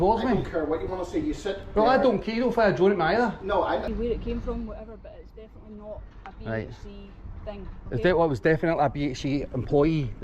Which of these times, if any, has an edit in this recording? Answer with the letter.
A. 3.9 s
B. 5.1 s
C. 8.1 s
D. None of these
A